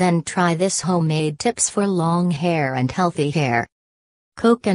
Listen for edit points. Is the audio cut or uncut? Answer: cut